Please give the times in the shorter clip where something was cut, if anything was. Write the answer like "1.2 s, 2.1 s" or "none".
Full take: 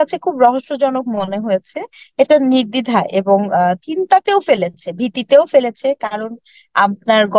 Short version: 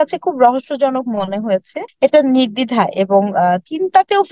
1.8 s

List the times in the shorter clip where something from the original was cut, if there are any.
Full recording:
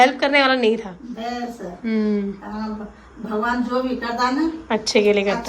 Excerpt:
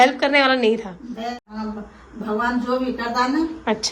1.4 s

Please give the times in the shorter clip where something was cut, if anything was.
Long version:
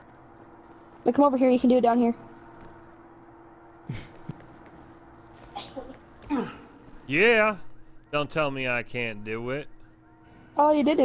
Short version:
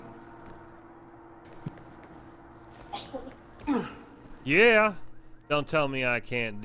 1.5 s

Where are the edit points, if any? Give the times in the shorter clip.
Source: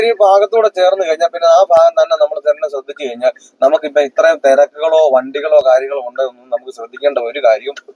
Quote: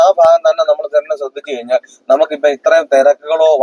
none

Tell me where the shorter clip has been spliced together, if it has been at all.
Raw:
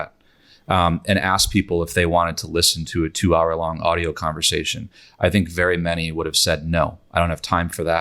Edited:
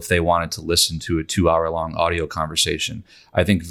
none

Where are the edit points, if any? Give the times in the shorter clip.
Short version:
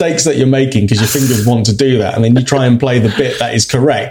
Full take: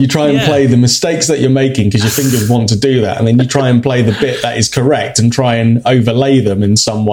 none

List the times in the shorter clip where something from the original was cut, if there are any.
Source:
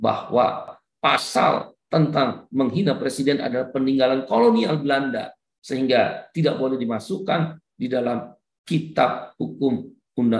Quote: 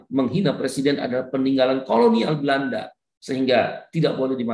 none

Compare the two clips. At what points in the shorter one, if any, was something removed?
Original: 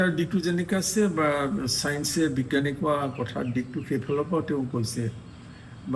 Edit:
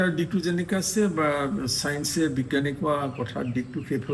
none

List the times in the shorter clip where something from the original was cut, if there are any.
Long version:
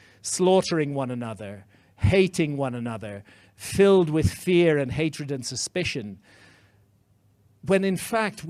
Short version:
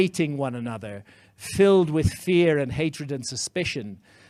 none

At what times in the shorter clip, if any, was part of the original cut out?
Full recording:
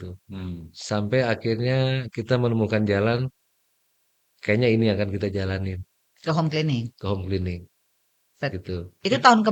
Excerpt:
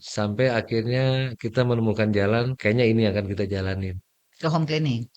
2.5 s

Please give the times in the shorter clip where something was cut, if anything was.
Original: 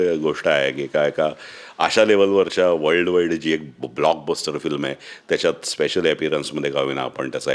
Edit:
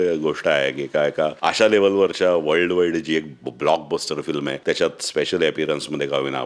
1.4 s, 4.6 s

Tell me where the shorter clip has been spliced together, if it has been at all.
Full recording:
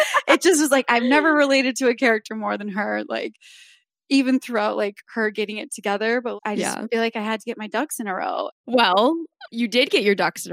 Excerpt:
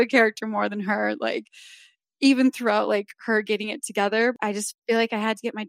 4.4 s

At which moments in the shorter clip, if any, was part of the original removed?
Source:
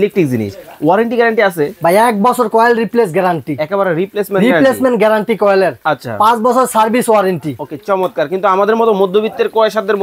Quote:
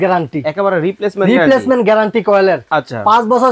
none

